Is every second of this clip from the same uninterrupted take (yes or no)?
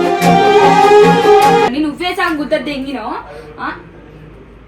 yes